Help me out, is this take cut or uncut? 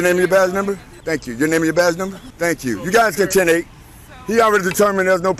cut